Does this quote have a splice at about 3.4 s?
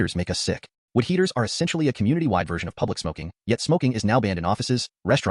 no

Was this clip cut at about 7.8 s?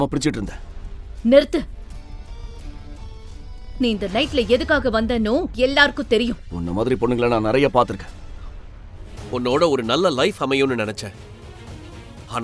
no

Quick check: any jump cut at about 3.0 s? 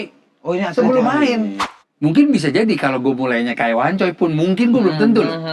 no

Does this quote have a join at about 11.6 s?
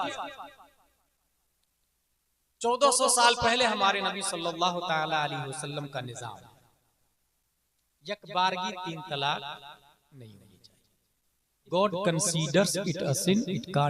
yes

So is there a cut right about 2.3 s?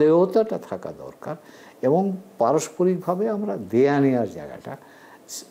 no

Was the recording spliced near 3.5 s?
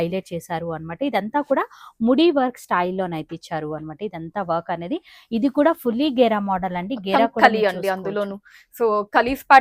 no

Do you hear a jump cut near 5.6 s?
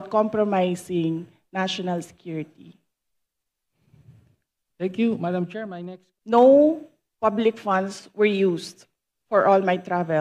yes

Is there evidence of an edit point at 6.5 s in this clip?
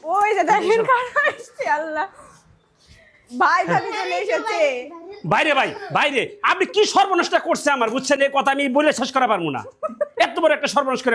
no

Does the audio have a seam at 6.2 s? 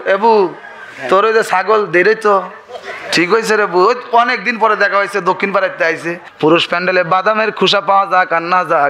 yes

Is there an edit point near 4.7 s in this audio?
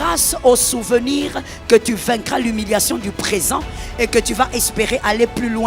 no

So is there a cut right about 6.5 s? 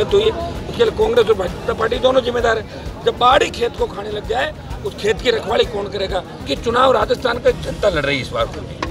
yes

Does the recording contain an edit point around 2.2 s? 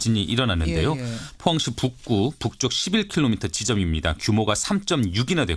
no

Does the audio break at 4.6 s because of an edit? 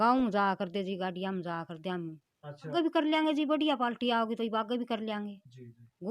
no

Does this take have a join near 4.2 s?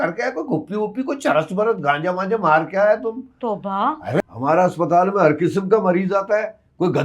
yes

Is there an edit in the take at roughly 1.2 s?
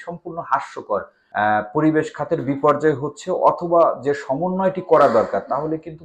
yes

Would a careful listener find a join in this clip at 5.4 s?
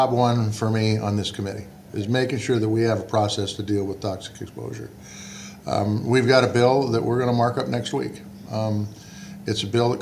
no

